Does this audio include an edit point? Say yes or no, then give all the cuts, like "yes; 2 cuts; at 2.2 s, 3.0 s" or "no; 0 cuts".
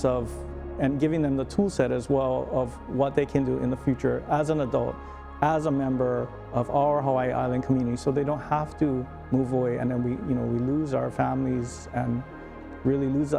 no; 0 cuts